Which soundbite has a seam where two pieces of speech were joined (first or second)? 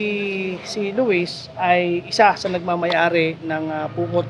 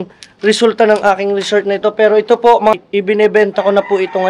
second